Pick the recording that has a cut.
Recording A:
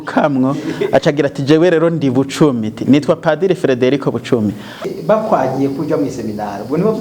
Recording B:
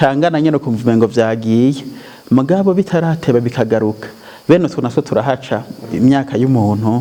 A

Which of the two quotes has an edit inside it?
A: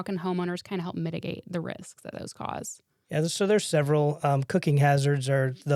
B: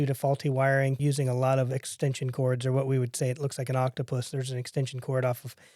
B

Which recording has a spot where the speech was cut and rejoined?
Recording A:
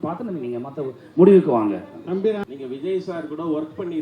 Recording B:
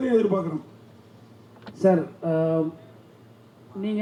A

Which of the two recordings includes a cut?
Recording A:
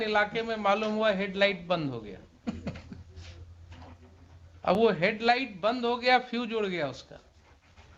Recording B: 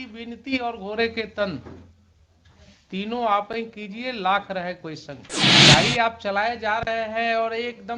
B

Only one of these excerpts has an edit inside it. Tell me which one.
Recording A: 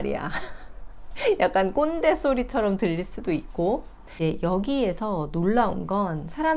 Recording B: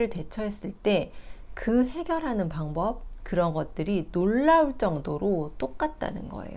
A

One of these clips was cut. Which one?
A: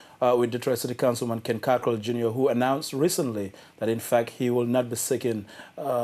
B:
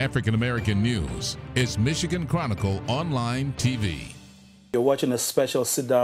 B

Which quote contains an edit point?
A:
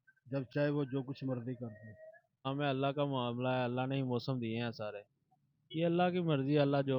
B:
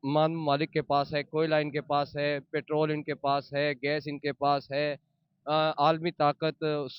A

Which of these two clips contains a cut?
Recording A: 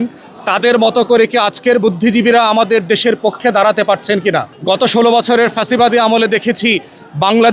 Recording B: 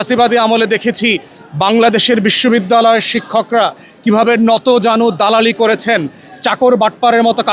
A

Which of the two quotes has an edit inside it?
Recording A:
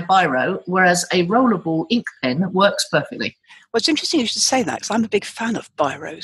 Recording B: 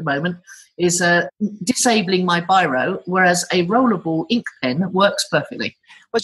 B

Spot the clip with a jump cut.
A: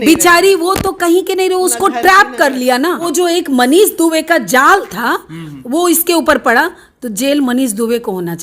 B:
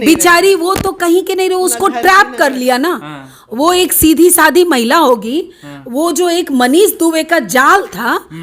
A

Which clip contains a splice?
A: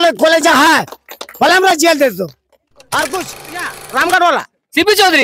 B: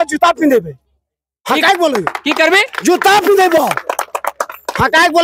A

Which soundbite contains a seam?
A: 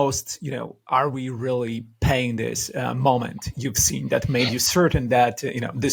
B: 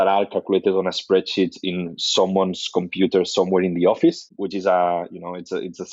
B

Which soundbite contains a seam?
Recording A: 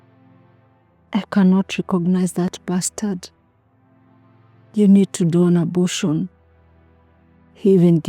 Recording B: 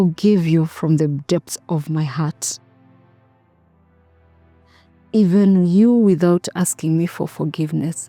A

